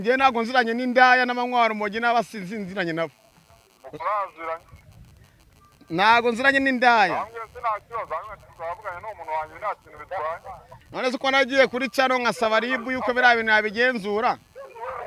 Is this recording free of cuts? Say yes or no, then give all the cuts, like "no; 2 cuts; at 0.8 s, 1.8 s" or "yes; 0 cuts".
yes; 0 cuts